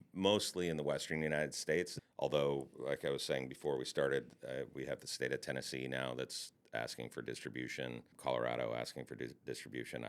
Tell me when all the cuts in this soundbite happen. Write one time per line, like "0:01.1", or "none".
0:02.0
0:08.1